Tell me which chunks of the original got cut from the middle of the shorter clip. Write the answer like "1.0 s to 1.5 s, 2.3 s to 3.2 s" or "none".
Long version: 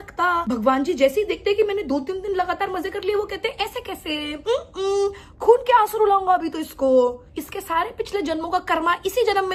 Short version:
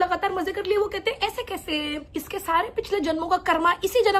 4.4 s to 7.2 s